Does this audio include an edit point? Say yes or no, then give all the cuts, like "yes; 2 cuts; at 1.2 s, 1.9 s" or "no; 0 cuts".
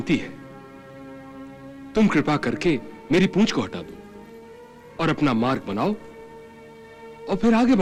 no; 0 cuts